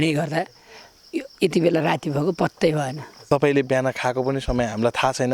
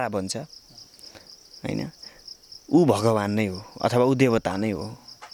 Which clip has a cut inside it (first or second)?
first